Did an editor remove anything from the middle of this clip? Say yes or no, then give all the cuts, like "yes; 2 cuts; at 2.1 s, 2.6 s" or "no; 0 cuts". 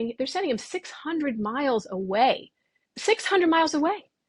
yes; 1 cut; at 2.9 s